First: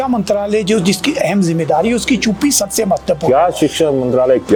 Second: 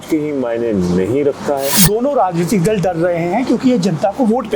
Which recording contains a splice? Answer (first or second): second